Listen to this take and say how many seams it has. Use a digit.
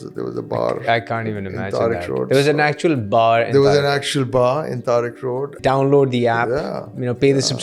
1